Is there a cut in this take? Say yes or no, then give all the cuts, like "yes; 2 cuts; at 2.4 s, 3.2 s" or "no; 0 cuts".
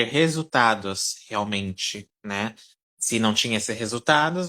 no; 0 cuts